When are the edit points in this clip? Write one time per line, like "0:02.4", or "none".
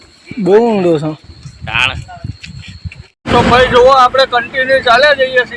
0:03.1